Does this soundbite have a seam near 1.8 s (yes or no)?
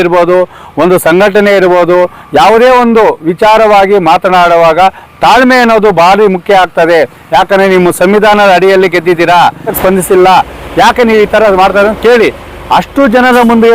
no